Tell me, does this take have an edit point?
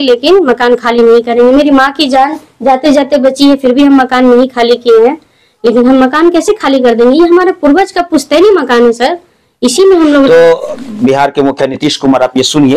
no; 0 cuts

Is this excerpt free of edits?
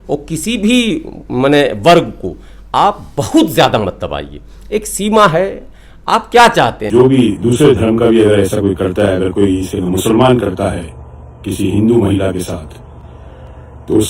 no; 1 cut; at 6.8 s

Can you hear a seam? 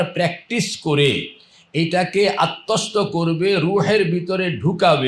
no; 0 cuts

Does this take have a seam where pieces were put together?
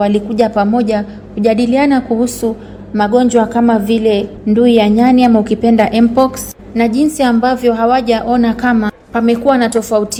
no; 0 cuts

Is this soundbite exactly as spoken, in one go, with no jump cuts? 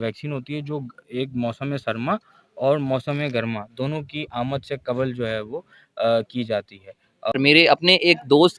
no; 1 cut; at 7.3 s

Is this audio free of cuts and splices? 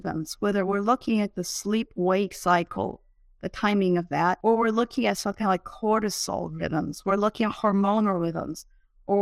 no; 1 cut; at 4.4 s

